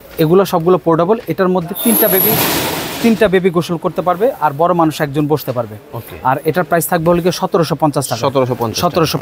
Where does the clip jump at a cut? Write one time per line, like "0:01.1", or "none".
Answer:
none